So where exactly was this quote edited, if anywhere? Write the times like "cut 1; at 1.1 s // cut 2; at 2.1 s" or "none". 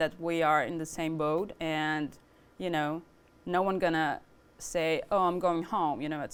none